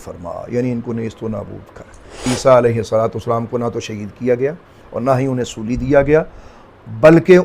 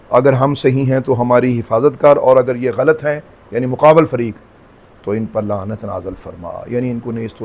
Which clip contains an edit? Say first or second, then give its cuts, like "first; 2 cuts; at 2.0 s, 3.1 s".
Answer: first; 1 cut; at 2.3 s